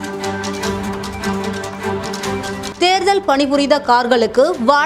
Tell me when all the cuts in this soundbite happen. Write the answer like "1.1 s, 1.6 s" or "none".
2.7 s